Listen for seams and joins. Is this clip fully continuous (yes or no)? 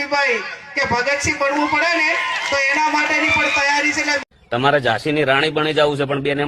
no